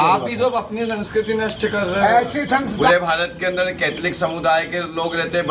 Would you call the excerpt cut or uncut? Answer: cut